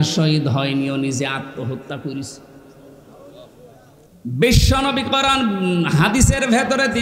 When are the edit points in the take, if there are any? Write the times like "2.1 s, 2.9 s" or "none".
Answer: 4.1 s